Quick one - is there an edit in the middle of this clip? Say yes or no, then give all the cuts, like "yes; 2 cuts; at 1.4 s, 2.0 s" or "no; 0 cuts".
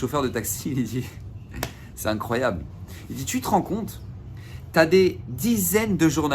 no; 0 cuts